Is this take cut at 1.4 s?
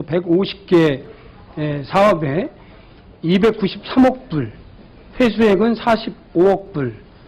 no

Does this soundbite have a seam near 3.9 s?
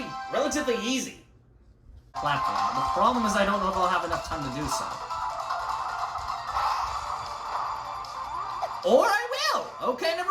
no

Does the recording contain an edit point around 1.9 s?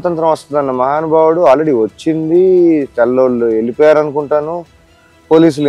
no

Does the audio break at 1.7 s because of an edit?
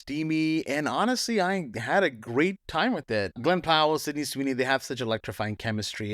no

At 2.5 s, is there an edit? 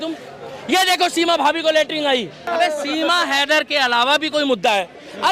yes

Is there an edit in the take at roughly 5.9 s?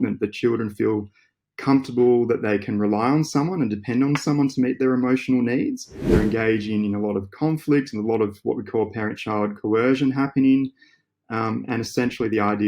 yes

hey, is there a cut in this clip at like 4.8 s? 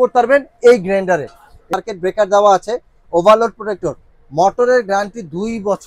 no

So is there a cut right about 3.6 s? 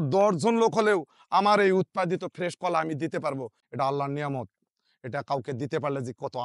yes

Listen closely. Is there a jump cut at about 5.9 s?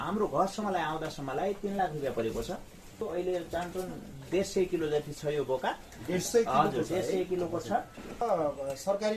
no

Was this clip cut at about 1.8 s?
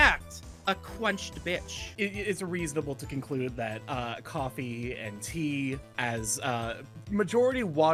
no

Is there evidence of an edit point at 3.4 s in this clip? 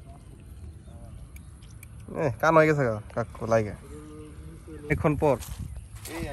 no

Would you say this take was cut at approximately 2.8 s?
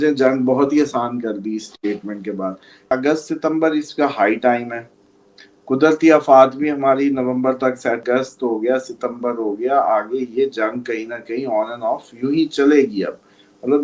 yes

